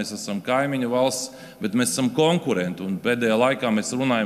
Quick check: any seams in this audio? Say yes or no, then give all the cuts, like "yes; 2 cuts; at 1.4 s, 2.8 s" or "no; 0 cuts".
no; 0 cuts